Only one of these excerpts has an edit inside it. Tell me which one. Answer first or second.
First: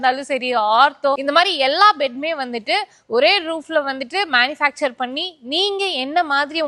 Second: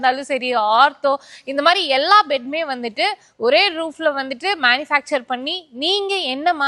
first